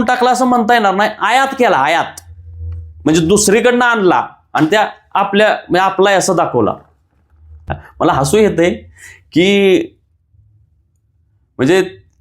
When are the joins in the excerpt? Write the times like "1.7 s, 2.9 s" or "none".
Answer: 7.8 s